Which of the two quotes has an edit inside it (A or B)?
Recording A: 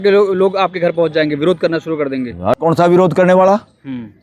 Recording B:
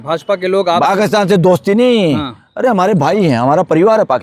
A